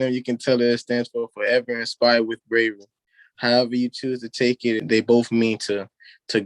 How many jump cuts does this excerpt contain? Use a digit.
1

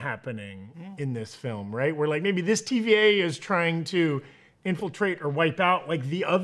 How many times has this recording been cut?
0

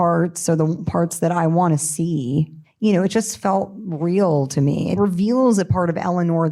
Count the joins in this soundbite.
2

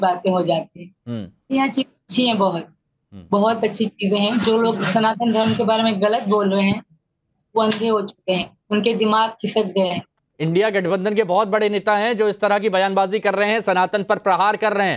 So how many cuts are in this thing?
1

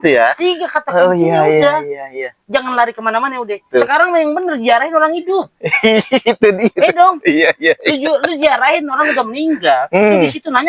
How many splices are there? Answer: 1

